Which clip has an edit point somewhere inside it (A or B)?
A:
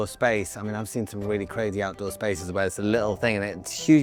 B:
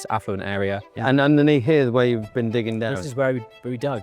B